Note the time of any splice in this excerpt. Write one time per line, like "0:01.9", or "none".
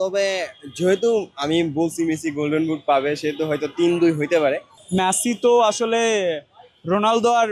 0:04.7